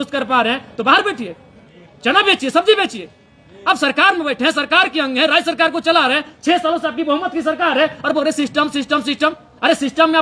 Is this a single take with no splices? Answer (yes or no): yes